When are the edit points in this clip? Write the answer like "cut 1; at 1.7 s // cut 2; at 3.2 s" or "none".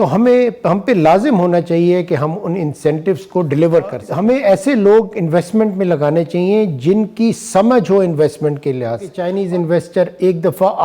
cut 1; at 4.1 s // cut 2; at 9.2 s